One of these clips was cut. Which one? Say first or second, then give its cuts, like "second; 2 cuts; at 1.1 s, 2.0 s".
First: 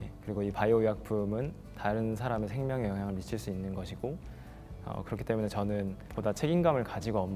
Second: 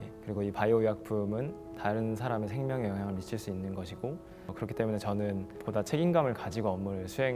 second; 1 cut; at 4.5 s